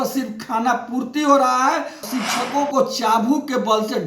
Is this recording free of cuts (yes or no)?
no